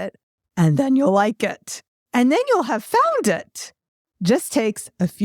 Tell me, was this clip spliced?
yes; 1 cut; at 2.8 s

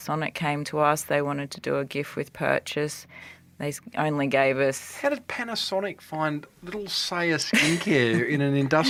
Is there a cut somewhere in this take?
no; 0 cuts

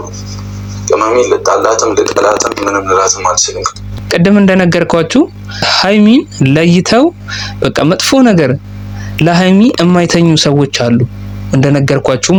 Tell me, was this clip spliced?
no; 0 cuts

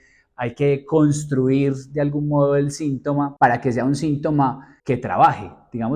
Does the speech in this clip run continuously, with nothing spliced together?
no; 2 cuts; at 3.3 s, 4.7 s

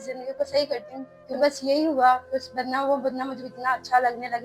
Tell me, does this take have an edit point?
yes; 1 cut; at 1.2 s

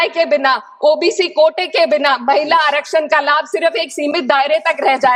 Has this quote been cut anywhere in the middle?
no; 0 cuts

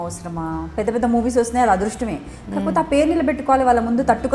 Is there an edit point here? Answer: no; 0 cuts

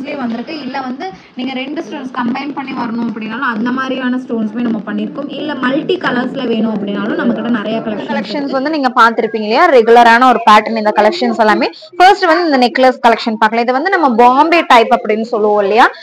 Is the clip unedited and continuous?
no; 1 cut; at 8.4 s

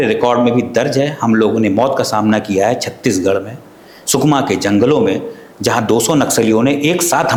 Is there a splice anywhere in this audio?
no; 0 cuts

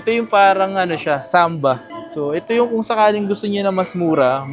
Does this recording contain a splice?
no; 0 cuts

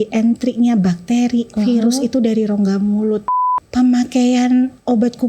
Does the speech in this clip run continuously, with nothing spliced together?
no; 1 cut; at 3.4 s

